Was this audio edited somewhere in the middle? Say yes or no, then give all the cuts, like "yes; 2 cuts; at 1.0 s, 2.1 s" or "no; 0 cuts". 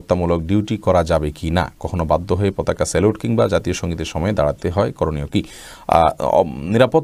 no; 0 cuts